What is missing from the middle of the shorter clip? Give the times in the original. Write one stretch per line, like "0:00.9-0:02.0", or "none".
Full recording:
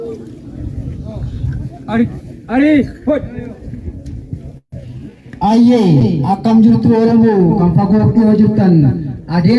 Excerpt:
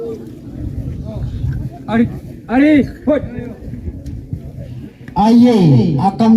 0:04.8-0:05.1